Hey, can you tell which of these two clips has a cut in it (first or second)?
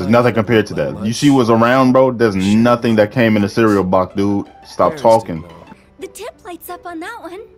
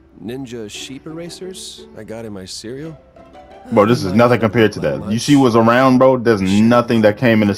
first